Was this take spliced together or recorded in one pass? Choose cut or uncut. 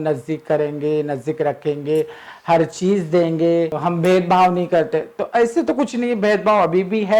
cut